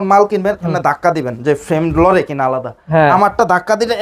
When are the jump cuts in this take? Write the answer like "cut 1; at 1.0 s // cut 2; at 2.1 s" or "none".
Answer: none